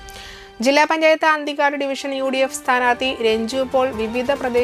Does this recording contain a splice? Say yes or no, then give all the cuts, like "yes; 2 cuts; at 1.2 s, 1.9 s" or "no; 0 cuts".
no; 0 cuts